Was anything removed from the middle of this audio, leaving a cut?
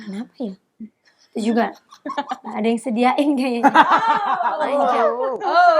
no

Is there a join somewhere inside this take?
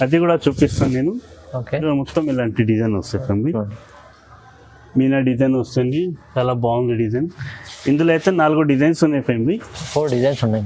yes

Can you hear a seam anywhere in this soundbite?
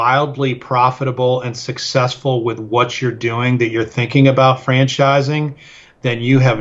no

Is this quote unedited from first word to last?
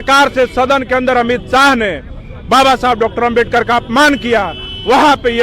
yes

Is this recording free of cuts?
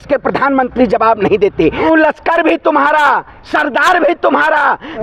no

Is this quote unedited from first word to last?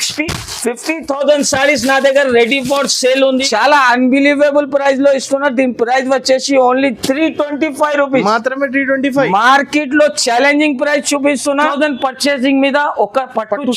no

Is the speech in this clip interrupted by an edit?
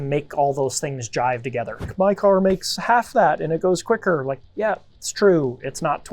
yes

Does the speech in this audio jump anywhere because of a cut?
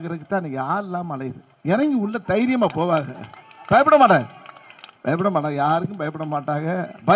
no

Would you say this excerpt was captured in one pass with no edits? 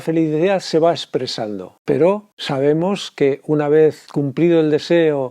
no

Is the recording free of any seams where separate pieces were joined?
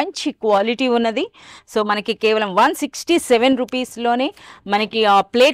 yes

